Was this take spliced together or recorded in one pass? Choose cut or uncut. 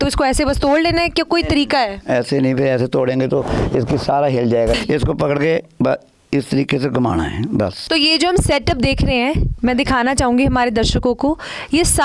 cut